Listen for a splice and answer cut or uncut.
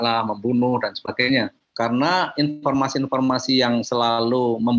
cut